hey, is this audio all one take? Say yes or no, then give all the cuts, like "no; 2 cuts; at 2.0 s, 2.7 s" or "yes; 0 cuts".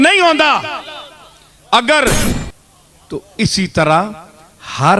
no; 1 cut; at 2.2 s